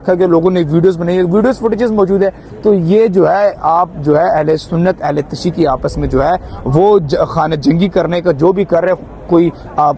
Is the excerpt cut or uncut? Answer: uncut